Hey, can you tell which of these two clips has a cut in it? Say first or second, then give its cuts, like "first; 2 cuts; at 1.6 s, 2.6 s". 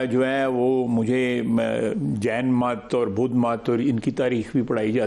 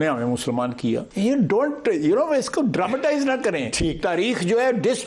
second; 1 cut; at 1.1 s